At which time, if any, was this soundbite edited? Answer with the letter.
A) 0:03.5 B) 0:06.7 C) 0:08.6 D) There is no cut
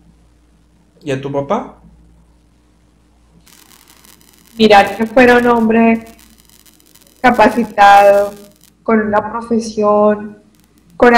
A